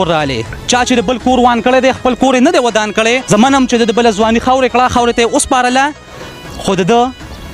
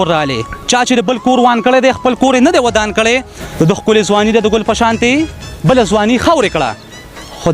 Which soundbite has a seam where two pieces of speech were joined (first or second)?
second